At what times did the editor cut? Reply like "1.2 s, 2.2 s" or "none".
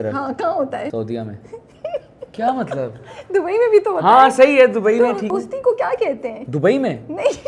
0.9 s, 2.3 s, 5.3 s